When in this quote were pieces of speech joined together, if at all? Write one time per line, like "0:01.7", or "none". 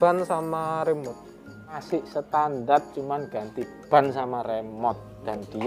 0:01.8